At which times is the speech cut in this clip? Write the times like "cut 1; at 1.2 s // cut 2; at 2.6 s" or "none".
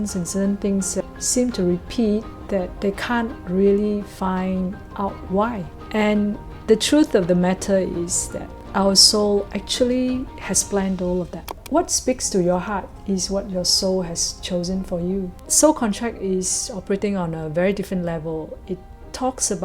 cut 1; at 11.6 s // cut 2; at 15.3 s